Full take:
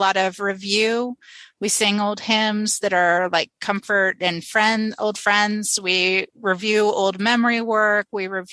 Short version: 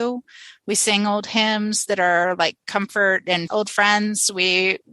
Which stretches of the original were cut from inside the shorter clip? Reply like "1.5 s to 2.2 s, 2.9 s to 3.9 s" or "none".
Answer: 4.4 s to 5.0 s